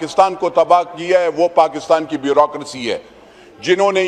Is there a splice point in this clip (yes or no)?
no